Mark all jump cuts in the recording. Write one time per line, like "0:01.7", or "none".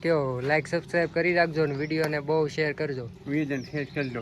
none